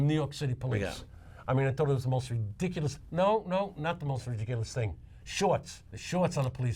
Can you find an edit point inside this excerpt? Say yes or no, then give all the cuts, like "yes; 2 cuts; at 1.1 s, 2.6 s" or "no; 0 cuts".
yes; 2 cuts; at 3.0 s, 5.9 s